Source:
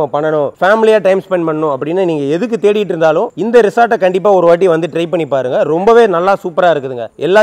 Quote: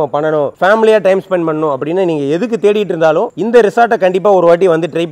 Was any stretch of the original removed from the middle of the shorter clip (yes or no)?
no